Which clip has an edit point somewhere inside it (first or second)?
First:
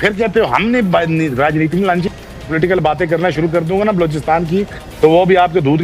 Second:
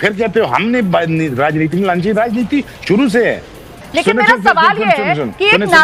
first